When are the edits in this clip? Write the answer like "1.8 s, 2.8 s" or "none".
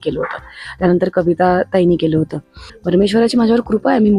2.7 s